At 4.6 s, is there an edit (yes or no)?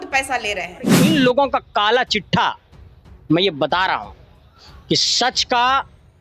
no